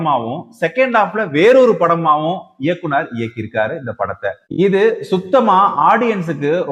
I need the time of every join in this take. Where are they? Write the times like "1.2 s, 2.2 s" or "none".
none